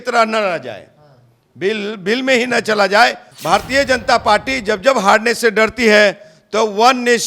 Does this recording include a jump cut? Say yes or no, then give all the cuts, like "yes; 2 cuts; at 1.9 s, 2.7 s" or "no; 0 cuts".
yes; 1 cut; at 3.3 s